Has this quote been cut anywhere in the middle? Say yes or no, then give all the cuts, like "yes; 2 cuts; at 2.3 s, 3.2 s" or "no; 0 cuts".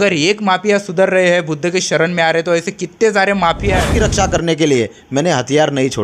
yes; 1 cut; at 3.8 s